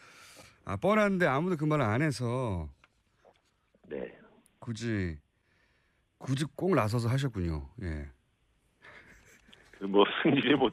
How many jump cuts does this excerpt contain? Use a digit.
0